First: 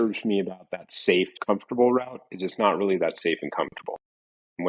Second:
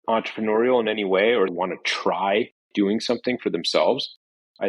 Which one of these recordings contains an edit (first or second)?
second